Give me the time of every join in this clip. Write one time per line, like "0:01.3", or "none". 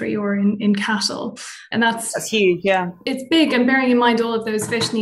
0:01.6
0:03.0